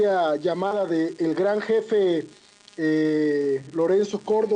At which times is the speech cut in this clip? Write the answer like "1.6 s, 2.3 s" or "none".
1.2 s